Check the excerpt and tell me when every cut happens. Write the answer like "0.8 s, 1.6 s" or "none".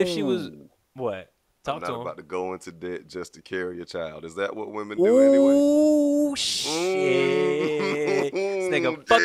none